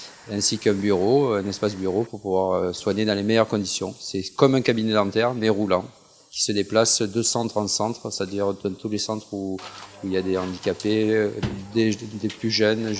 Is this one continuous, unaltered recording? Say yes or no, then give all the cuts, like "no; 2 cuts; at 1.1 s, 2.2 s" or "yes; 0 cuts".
no; 1 cut; at 5.9 s